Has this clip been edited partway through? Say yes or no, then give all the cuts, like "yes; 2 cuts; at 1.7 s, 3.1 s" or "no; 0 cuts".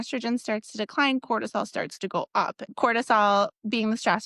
yes; 1 cut; at 2.7 s